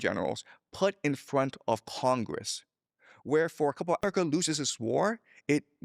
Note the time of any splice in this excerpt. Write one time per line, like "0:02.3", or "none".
0:04.0